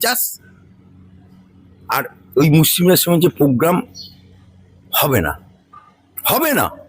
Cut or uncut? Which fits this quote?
uncut